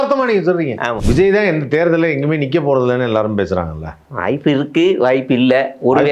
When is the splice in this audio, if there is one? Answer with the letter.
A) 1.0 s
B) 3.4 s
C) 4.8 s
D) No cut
A